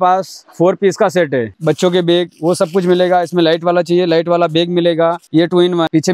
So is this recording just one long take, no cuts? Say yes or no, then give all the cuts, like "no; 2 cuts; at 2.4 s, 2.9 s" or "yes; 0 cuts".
no; 2 cuts; at 1.5 s, 5.2 s